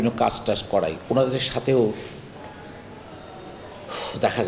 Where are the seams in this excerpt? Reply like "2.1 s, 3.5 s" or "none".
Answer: none